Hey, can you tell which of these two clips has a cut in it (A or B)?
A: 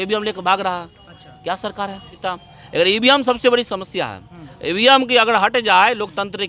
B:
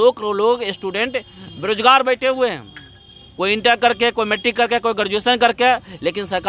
A